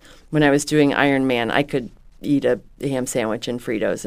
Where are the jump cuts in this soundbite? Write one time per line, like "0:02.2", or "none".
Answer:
none